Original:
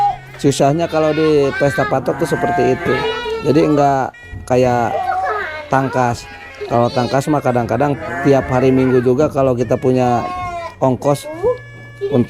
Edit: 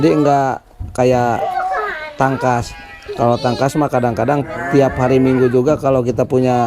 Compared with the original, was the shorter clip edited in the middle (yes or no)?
no